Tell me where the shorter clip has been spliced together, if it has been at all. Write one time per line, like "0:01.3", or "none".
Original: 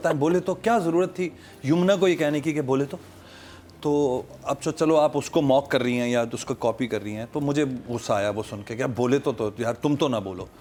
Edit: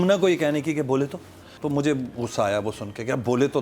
0:01.5